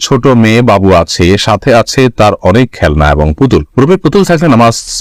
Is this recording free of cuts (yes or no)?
yes